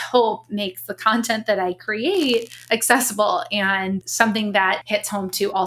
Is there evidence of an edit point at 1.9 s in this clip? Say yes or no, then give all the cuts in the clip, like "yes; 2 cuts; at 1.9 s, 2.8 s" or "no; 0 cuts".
no; 2 cuts; at 4.1 s, 4.8 s